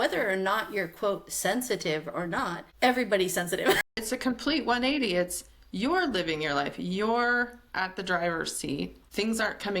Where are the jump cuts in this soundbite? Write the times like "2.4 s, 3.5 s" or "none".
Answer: 4.0 s